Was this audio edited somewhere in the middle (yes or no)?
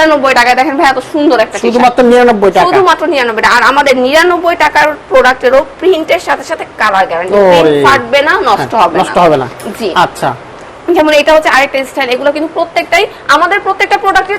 no